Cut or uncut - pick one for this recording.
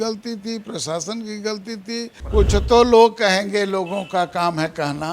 cut